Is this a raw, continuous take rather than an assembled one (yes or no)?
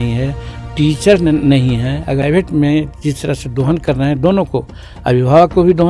no